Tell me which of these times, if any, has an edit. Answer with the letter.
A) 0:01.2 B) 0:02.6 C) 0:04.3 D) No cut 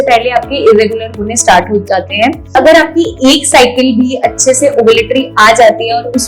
B